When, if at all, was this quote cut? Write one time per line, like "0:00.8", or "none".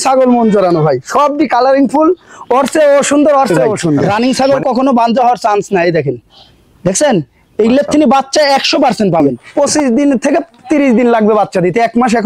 0:04.1
0:09.4